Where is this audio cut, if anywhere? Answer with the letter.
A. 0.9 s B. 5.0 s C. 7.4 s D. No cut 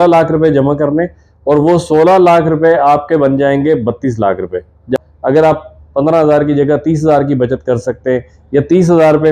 B